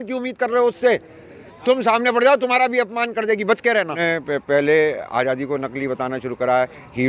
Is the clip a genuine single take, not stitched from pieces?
no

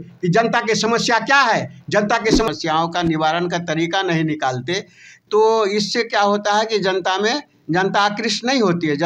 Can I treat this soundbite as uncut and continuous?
no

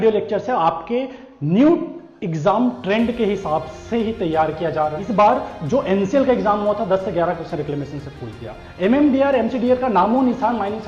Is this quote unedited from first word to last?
no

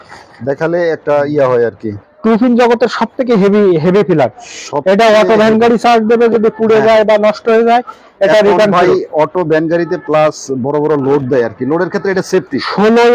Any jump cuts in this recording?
no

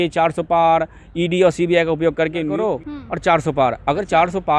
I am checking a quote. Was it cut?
yes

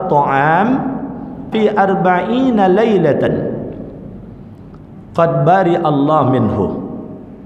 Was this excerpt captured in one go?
no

